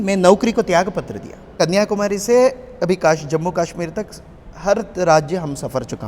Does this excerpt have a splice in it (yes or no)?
yes